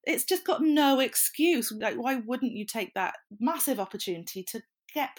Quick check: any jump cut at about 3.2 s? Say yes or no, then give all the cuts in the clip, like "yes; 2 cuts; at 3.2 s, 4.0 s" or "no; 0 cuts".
no; 1 cut; at 1.7 s